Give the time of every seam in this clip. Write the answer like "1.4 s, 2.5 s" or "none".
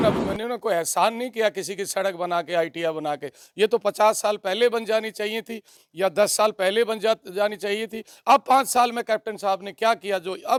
none